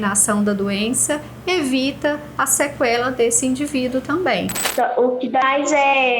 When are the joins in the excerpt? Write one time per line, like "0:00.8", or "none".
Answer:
0:04.5